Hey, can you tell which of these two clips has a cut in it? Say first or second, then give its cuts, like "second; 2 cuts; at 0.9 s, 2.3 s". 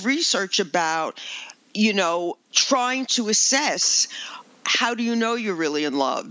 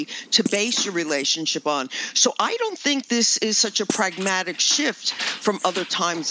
first; 1 cut; at 2.5 s